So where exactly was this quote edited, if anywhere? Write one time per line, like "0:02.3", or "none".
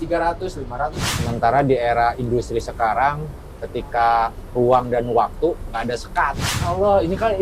0:01.0
0:06.5